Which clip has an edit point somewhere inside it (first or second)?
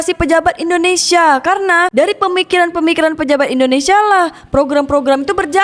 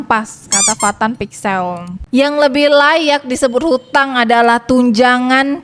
second